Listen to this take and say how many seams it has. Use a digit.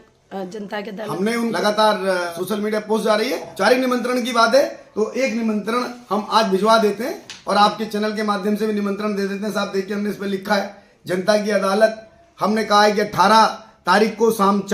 3